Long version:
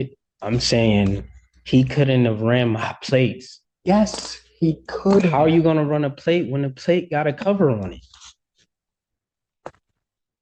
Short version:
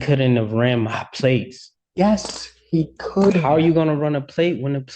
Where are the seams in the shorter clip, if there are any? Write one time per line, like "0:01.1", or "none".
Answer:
none